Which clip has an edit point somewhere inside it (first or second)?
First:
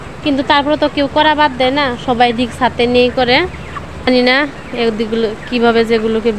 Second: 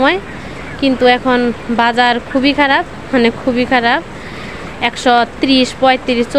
first